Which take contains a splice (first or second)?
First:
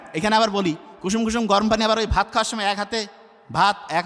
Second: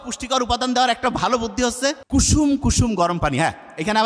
second